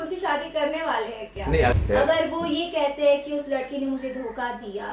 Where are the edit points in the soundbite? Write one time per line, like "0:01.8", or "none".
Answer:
0:01.7